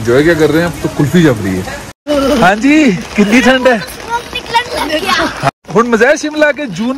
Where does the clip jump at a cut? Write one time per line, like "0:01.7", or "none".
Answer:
0:02.1
0:05.5